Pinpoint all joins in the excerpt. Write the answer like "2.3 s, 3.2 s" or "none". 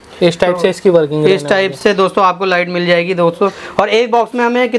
none

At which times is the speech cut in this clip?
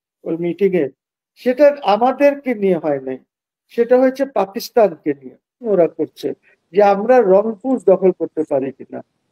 5.7 s

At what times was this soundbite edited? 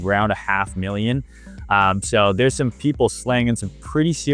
none

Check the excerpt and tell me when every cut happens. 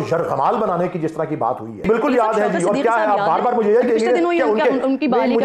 1.8 s

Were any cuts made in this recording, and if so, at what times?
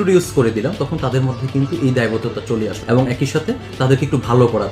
2.8 s

